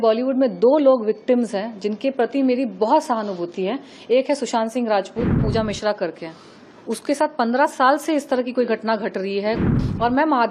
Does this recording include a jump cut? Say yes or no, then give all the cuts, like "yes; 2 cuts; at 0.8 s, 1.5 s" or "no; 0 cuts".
yes; 2 cuts; at 5.4 s, 9.7 s